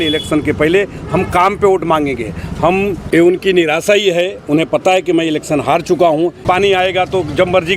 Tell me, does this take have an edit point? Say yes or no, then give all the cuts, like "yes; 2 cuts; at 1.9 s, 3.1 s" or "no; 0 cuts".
yes; 2 cuts; at 3.0 s, 6.4 s